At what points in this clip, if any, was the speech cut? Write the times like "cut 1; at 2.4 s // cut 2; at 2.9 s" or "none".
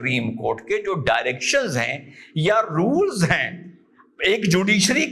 none

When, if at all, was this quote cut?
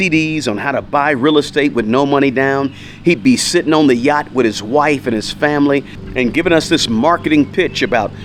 none

